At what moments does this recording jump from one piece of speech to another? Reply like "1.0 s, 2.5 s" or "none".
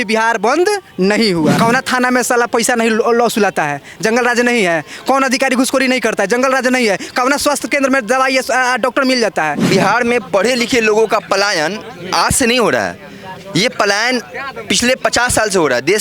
1.6 s, 9.6 s